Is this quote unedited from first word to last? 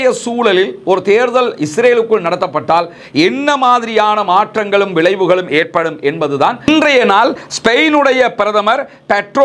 no; 1 cut; at 6.6 s

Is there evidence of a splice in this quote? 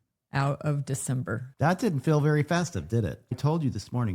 yes; 2 cuts; at 1.5 s, 3.3 s

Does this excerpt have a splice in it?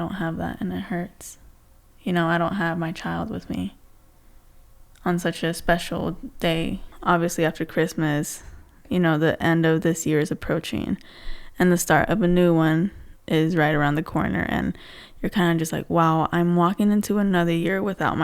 yes; 1 cut; at 6.9 s

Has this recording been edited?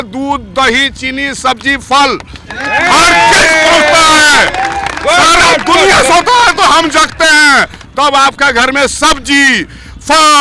no; 0 cuts

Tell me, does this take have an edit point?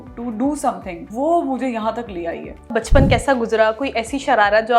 yes; 2 cuts; at 0.9 s, 2.7 s

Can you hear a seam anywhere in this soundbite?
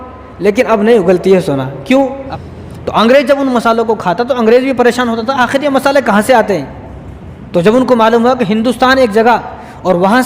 yes; 1 cut; at 2.3 s

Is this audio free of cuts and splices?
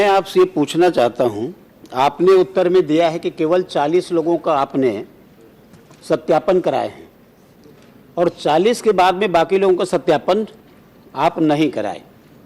yes; 0 cuts

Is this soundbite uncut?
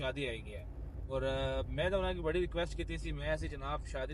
yes; 0 cuts

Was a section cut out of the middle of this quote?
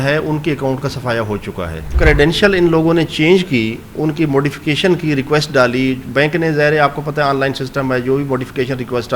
yes; 1 cut; at 1.9 s

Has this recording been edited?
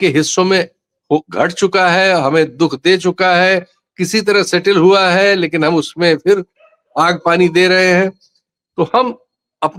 no; 0 cuts

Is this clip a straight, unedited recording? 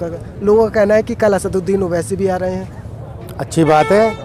yes; 0 cuts

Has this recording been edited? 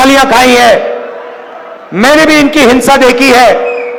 no; 0 cuts

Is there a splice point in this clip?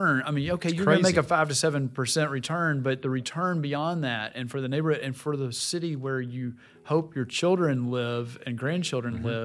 no; 0 cuts

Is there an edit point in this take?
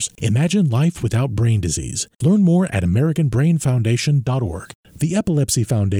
yes; 1 cut; at 4.7 s

